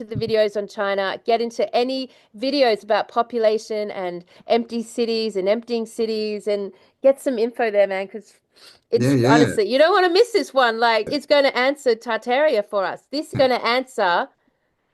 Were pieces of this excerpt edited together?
yes; 2 cuts; at 11.1 s, 13.3 s

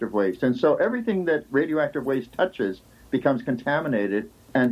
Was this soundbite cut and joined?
no; 0 cuts

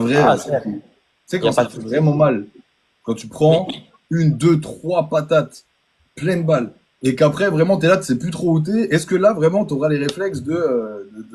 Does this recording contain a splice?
no; 0 cuts

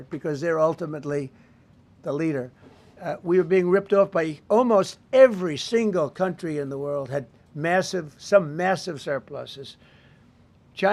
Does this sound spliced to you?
no; 0 cuts

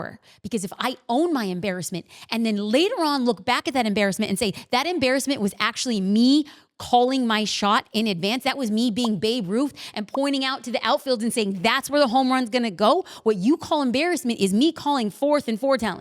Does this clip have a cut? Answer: no; 0 cuts

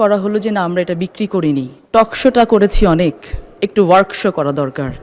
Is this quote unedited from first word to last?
no; 1 cut; at 1.8 s

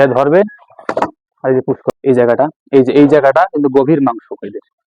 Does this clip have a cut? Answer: yes; 1 cut; at 1.9 s

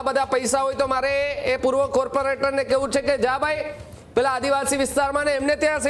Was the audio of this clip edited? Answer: no; 0 cuts

